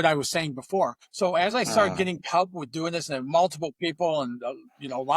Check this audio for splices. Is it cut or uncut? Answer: cut